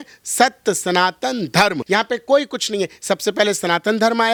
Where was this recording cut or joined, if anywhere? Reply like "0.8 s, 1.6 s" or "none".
none